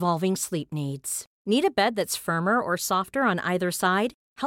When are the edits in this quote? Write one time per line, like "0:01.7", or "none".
none